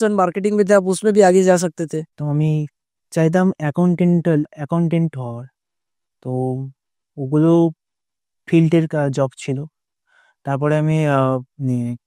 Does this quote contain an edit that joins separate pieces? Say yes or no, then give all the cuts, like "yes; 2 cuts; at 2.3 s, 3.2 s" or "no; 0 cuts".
yes; 1 cut; at 2.1 s